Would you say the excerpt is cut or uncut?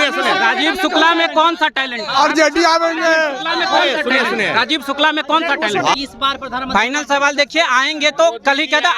cut